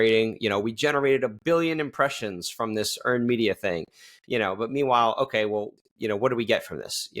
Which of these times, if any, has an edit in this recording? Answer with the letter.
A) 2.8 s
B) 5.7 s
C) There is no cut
B